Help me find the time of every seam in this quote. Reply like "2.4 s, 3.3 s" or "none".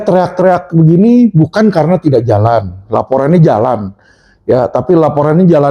none